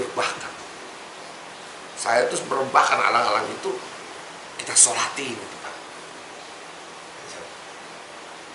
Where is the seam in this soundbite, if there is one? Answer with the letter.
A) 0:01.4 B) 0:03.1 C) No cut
C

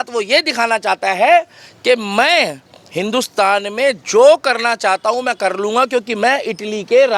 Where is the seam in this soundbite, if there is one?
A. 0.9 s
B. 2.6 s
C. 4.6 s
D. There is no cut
D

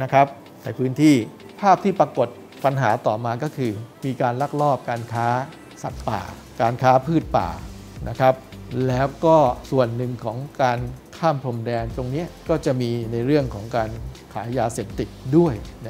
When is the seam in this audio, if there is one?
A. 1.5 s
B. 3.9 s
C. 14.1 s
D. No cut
A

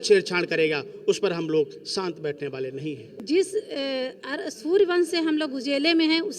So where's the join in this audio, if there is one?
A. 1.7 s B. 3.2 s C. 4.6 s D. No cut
B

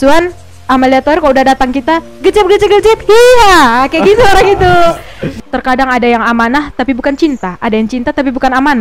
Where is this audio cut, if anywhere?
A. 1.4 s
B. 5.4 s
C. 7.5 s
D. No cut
B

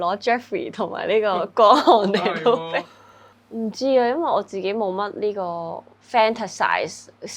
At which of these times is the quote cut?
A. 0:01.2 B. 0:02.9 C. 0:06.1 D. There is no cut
D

